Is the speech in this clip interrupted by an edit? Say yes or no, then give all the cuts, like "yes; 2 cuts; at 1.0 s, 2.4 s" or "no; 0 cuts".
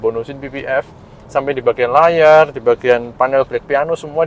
no; 0 cuts